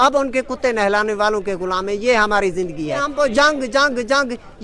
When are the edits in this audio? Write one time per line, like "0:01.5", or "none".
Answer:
0:03.1